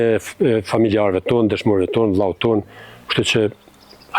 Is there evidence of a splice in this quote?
no; 0 cuts

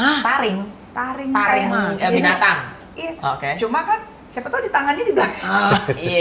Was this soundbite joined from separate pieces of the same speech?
no; 0 cuts

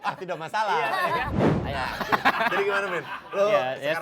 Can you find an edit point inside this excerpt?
yes; 1 cut; at 1.3 s

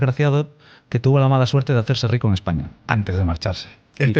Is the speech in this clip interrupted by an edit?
yes; 1 cut; at 2.7 s

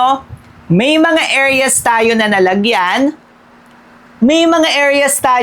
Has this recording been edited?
no; 0 cuts

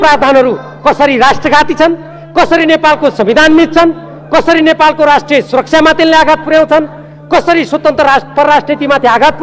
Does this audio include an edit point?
no; 0 cuts

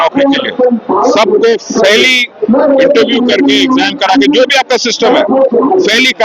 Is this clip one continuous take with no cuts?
yes; 0 cuts

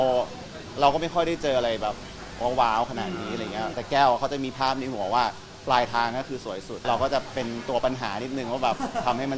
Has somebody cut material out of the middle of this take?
yes; 2 cuts; at 3.8 s, 6.8 s

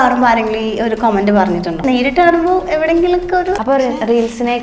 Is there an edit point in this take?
yes; 2 cuts; at 1.8 s, 3.6 s

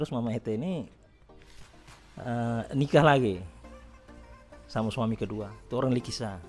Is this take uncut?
yes; 0 cuts

